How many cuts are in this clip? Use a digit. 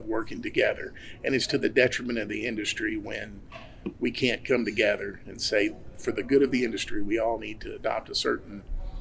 0